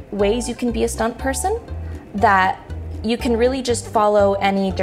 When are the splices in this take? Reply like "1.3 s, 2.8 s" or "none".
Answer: none